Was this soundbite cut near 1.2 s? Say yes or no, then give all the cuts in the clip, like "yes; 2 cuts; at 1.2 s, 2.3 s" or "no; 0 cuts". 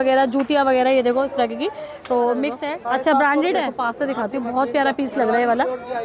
no; 2 cuts; at 2.7 s, 3.7 s